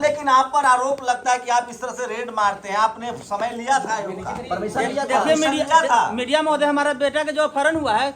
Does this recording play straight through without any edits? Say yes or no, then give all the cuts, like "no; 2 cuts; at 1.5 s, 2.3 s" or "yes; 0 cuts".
yes; 0 cuts